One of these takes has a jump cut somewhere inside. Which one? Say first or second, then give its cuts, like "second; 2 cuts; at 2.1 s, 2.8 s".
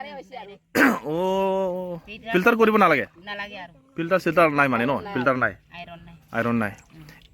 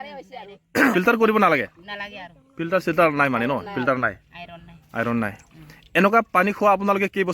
second; 1 cut; at 0.9 s